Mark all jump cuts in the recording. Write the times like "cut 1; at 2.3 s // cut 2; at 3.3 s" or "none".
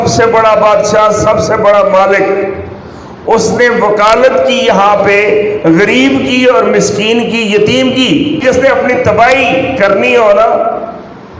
cut 1; at 8.4 s